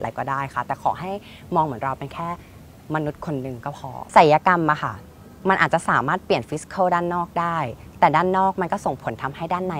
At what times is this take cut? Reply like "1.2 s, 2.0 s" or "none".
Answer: none